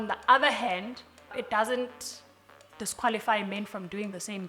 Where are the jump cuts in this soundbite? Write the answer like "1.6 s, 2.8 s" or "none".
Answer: 1.4 s